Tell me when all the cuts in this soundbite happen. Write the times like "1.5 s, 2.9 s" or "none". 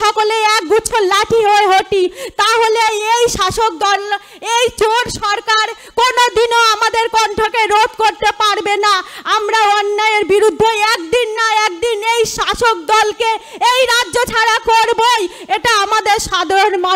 none